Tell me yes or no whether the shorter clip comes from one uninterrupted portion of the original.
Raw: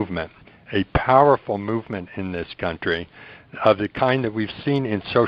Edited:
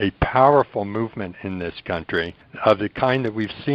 no